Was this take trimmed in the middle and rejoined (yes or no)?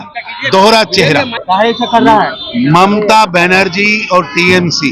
yes